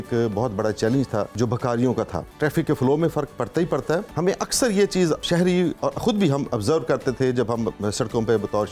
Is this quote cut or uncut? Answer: cut